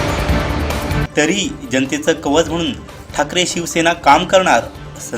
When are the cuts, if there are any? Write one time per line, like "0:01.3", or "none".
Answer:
0:00.9